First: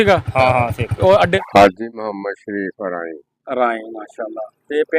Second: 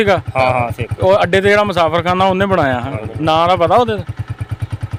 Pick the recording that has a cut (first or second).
first